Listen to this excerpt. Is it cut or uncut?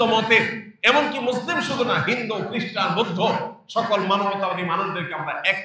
uncut